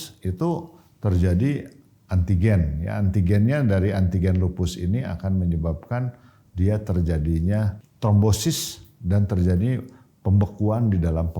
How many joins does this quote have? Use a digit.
1